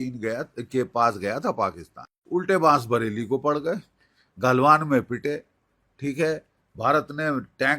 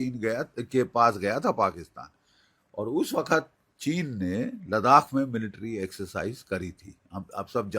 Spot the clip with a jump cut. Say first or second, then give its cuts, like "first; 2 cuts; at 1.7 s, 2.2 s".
first; 1 cut; at 2.1 s